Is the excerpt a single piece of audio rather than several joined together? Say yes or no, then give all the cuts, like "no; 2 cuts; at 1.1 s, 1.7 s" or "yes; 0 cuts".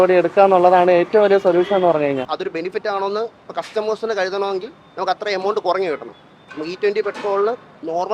no; 1 cut; at 2.3 s